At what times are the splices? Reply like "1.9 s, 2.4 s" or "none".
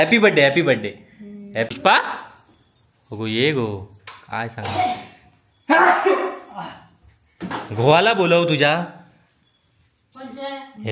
1.7 s